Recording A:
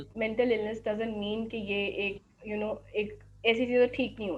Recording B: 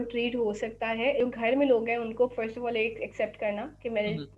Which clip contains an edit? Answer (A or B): B